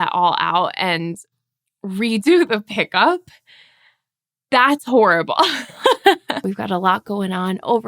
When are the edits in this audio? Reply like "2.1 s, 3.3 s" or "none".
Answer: 6.5 s